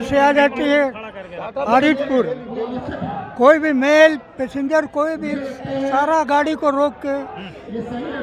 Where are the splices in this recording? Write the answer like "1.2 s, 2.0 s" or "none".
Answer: none